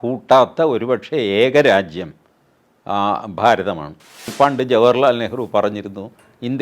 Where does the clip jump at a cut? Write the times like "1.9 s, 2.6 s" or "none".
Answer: 4.3 s